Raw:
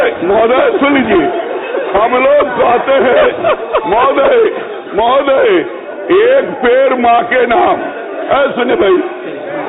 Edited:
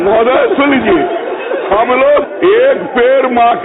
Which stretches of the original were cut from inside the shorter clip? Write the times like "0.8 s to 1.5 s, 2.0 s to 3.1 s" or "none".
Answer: 2.5 s to 5.9 s